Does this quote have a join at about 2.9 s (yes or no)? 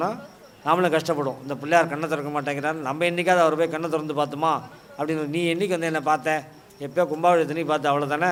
no